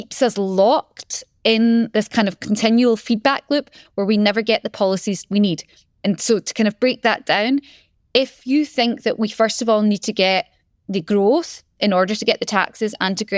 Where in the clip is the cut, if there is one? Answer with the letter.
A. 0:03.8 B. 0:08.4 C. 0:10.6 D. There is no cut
D